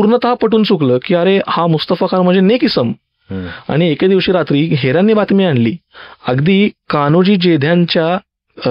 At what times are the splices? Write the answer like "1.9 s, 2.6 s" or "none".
none